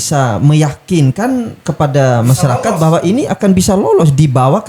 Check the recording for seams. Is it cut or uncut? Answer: uncut